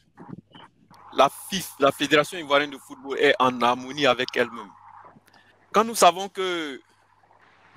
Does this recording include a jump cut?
no; 0 cuts

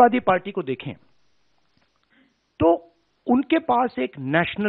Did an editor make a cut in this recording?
no; 0 cuts

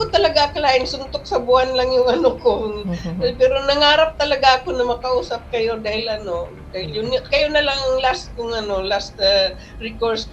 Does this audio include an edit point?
no; 0 cuts

